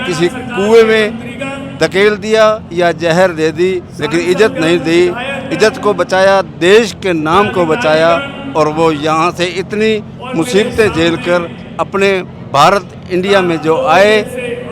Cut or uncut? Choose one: uncut